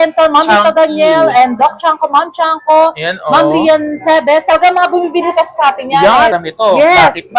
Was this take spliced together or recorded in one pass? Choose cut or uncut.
cut